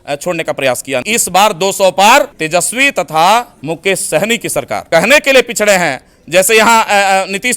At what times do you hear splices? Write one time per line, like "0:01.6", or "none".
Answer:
0:01.1
0:02.4
0:03.6
0:04.8